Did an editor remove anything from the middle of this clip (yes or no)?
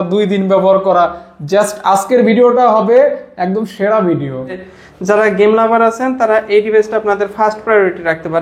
yes